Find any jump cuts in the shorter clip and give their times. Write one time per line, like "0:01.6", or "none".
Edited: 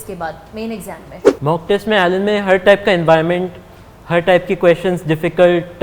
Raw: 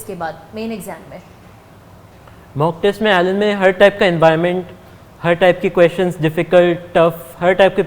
0:01.2